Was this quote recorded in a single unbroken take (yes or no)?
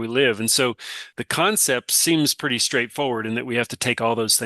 no